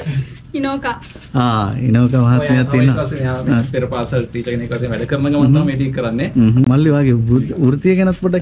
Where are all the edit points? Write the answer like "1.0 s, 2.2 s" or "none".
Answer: 6.7 s